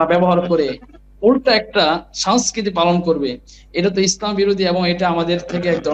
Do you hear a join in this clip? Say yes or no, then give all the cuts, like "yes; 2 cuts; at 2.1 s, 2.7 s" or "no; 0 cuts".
no; 0 cuts